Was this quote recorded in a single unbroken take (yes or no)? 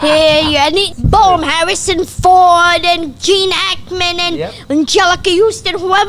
no